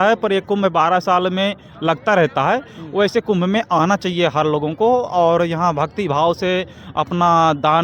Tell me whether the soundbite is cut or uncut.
uncut